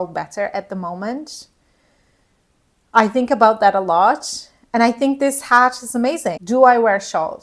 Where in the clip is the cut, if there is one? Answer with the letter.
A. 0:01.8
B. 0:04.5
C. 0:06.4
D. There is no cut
C